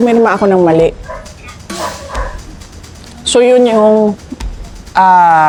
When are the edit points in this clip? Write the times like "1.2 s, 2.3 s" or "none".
none